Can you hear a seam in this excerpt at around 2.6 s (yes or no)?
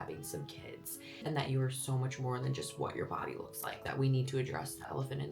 no